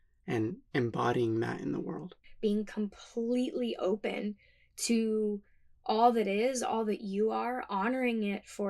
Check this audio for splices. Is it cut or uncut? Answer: cut